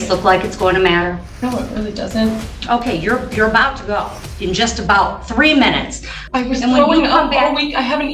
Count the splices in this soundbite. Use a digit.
3